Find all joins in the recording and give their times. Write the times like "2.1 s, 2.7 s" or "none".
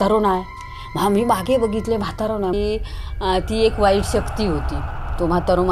2.5 s